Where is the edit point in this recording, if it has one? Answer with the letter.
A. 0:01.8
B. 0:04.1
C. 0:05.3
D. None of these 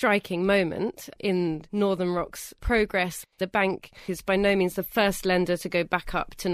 B